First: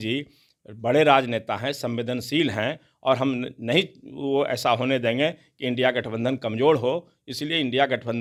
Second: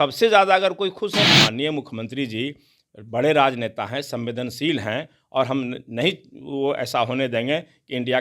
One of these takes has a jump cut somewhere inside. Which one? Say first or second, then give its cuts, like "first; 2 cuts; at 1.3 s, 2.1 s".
second; 1 cut; at 1.3 s